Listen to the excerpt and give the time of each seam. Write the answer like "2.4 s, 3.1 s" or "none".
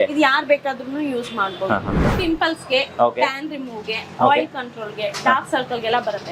2.0 s